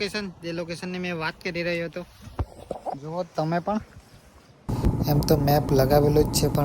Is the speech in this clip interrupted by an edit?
yes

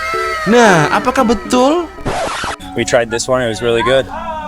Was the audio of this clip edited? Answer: yes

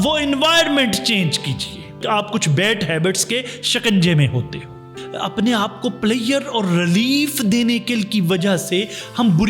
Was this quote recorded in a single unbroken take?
no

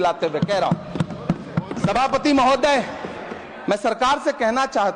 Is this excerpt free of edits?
yes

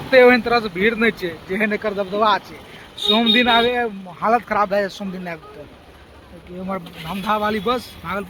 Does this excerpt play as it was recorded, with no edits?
yes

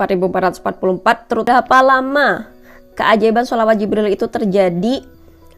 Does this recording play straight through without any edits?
no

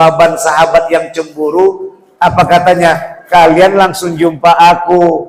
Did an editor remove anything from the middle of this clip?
no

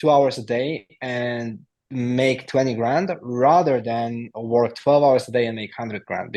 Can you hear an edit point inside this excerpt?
no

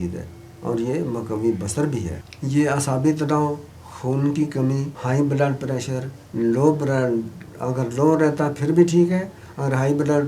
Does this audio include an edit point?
yes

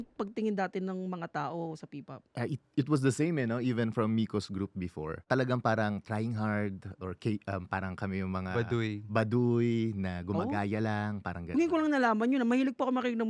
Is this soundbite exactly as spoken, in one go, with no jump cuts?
yes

